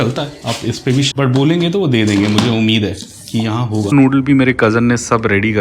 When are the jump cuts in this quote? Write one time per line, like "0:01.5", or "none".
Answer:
0:01.1
0:03.9

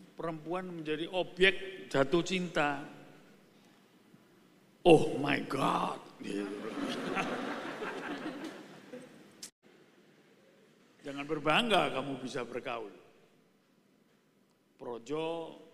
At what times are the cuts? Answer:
0:09.5

